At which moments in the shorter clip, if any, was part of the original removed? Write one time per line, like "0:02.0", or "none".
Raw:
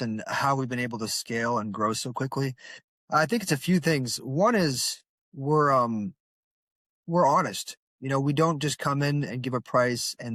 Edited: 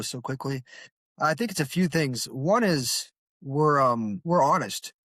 0:04.2